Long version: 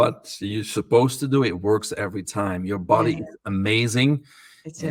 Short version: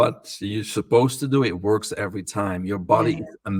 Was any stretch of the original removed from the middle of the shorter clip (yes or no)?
no